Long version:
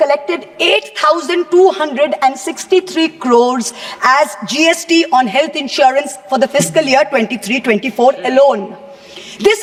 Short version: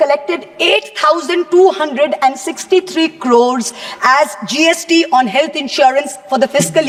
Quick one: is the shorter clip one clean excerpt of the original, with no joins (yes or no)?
yes